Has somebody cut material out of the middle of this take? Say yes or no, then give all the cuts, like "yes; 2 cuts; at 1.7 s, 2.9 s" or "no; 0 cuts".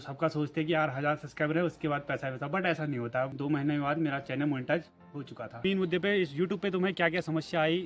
yes; 2 cuts; at 3.3 s, 5.6 s